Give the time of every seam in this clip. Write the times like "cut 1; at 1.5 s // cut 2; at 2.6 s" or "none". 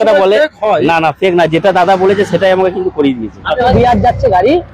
cut 1; at 3.7 s